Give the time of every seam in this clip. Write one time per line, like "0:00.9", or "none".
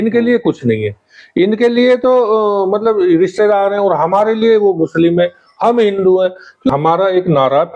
0:06.7